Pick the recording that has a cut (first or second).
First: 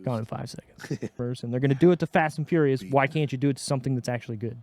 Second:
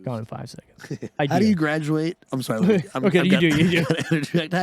second